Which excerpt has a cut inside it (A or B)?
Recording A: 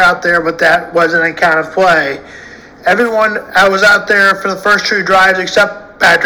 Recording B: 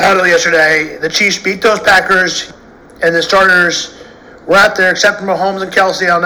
B